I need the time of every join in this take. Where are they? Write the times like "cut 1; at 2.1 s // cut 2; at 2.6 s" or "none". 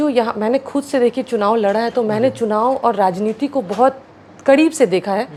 none